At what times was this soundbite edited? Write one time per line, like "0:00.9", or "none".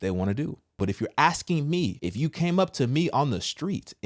0:00.8
0:02.0